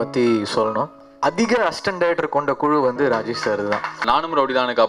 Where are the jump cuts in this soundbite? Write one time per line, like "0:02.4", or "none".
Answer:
0:01.0
0:04.0